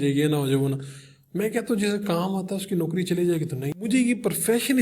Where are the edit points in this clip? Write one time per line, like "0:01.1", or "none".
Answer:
0:03.9